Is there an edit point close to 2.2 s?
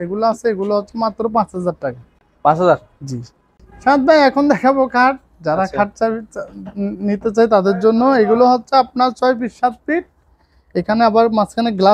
no; 0 cuts

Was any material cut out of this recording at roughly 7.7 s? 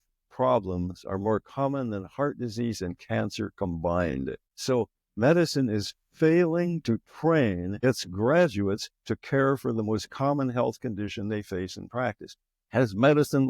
yes; 2 cuts; at 4.5 s, 7.7 s

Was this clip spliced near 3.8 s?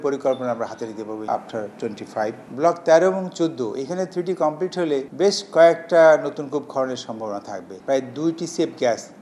no; 3 cuts; at 1.3 s, 5.1 s, 7.6 s

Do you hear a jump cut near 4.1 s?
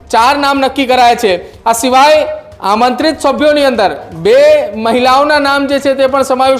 no; 1 cut; at 1.5 s

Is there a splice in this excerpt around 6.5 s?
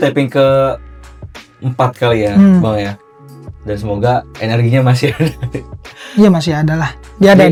no; 0 cuts

